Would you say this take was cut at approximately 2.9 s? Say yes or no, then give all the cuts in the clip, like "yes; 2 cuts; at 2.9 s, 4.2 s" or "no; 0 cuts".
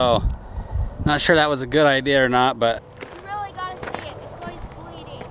yes; 1 cut; at 2.9 s